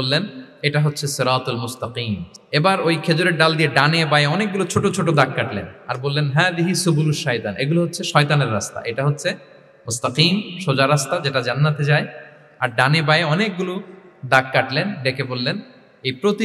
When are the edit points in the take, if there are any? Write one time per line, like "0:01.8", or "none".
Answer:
0:02.3